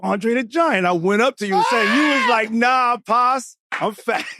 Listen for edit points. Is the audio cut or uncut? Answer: uncut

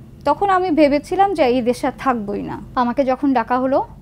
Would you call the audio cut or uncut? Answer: cut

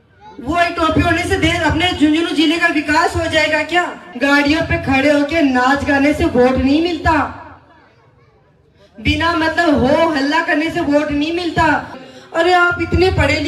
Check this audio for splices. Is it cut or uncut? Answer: cut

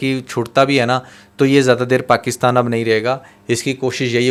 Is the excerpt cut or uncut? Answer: uncut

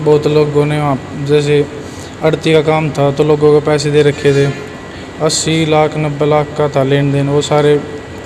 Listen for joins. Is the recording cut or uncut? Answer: uncut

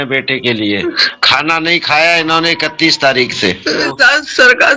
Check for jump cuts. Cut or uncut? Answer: cut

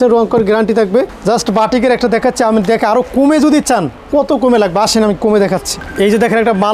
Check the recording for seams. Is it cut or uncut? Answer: cut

